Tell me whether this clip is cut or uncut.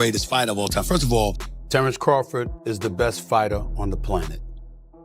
cut